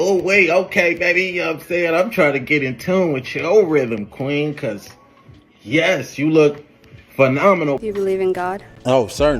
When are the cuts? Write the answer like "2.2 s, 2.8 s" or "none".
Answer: 7.8 s